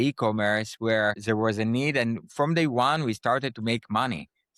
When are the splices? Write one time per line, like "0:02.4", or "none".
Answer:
0:01.2